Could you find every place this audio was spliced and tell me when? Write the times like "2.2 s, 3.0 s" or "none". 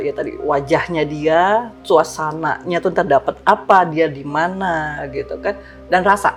none